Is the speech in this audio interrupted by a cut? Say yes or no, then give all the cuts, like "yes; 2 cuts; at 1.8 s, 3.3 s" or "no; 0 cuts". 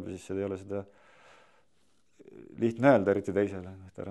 no; 0 cuts